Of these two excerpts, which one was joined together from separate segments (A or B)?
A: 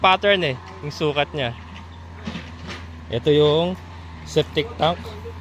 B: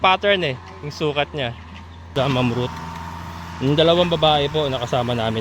B